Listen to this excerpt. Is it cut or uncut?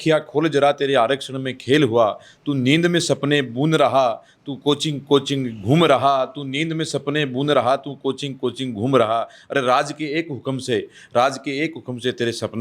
uncut